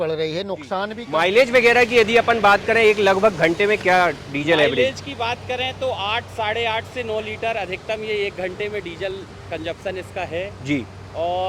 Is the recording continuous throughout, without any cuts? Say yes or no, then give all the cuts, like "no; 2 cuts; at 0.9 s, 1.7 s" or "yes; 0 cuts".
no; 1 cut; at 1.0 s